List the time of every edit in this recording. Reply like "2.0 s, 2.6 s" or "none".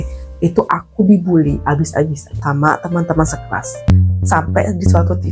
3.9 s